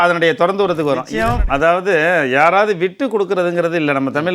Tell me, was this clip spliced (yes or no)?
yes